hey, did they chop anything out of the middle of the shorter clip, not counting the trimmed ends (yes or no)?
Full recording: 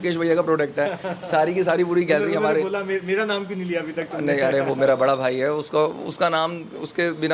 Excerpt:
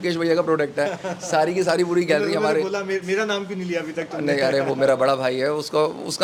no